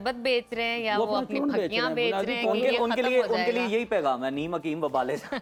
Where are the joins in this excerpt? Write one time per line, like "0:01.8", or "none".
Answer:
none